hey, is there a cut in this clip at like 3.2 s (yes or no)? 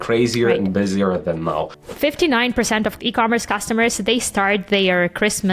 no